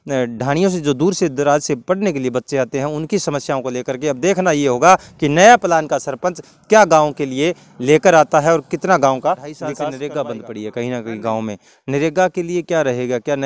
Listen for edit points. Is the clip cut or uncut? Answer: cut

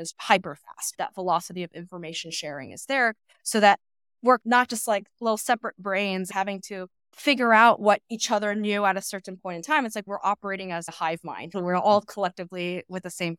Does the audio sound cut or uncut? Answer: cut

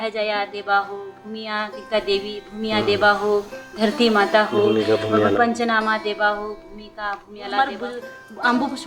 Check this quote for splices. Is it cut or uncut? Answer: cut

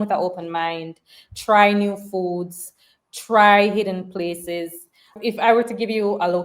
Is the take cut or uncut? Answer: cut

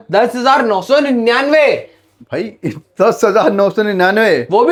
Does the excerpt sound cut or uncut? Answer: uncut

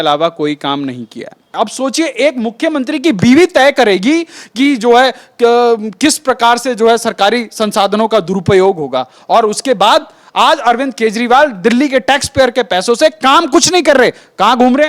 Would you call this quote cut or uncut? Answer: cut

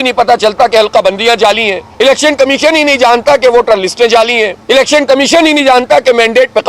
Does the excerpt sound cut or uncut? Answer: cut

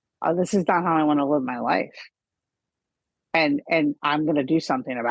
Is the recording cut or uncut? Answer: uncut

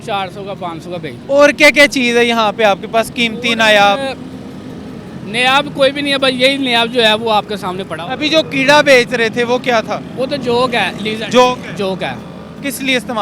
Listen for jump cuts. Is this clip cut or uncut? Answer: uncut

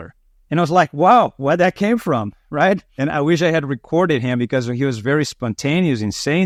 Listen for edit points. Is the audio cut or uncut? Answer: uncut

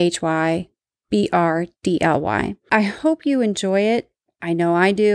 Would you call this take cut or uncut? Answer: cut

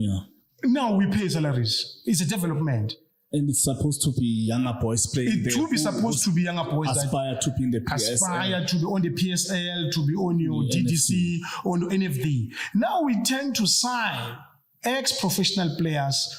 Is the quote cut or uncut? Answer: uncut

